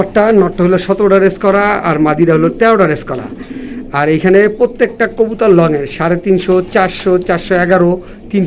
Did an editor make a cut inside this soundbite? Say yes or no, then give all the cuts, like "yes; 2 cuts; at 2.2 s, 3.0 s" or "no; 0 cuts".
no; 0 cuts